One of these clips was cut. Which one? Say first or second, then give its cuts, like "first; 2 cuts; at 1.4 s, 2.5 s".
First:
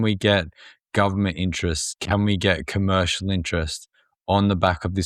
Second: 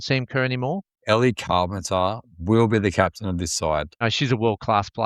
second; 2 cuts; at 0.9 s, 4.0 s